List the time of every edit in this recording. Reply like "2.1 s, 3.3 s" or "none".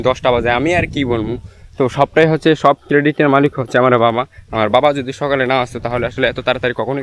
none